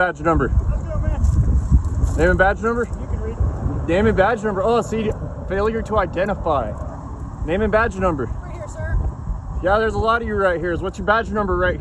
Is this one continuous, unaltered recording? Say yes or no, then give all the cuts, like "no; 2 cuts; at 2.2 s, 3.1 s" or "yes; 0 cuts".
yes; 0 cuts